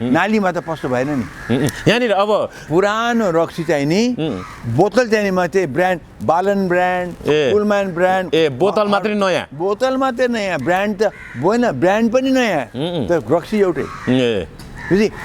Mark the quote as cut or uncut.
cut